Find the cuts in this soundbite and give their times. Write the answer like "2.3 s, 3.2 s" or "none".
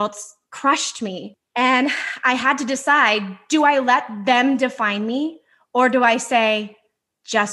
1.4 s